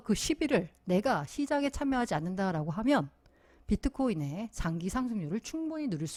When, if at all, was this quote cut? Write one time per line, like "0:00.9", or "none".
none